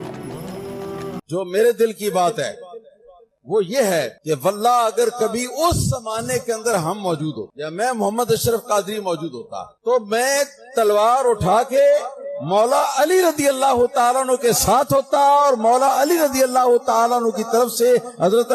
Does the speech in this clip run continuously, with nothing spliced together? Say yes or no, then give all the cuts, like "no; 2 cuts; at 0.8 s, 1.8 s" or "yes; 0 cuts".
no; 1 cut; at 1.1 s